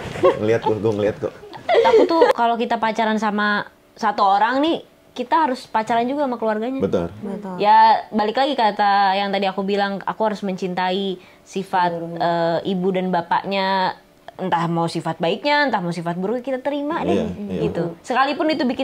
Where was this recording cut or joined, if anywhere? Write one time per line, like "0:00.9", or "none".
0:02.4